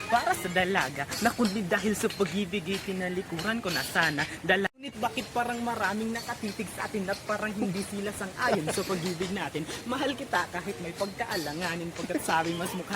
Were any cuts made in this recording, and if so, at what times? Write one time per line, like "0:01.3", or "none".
0:04.7